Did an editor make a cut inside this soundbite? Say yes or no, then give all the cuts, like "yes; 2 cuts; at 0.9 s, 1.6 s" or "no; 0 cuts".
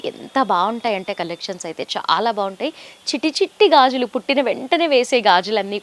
no; 0 cuts